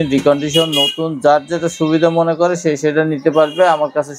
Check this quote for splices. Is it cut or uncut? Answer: uncut